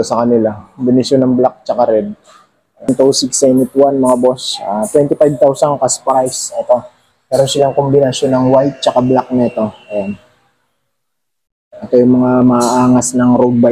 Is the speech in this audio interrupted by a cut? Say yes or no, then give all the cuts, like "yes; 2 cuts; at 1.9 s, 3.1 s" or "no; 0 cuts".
yes; 1 cut; at 2.9 s